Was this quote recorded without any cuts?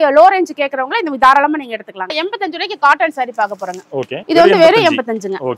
no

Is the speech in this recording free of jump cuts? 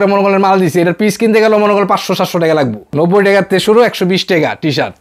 no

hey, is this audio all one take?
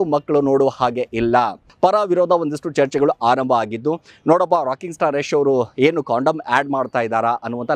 no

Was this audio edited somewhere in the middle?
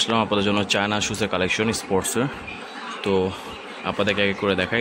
no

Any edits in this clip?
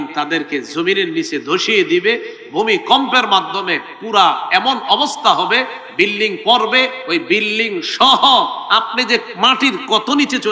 no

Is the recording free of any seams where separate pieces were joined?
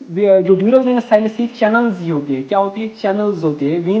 yes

